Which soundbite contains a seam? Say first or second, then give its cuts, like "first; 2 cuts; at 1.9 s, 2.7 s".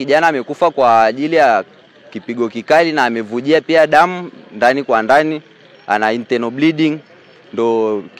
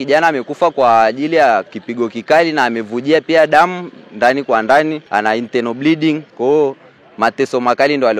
second; 3 cuts; at 1.8 s, 5.0 s, 6.3 s